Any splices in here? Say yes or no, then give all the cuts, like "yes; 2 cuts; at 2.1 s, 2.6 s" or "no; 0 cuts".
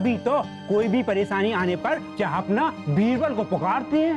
yes; 1 cut; at 2.1 s